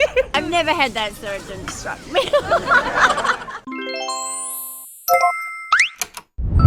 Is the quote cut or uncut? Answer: uncut